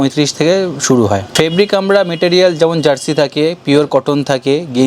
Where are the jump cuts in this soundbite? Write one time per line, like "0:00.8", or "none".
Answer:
0:01.2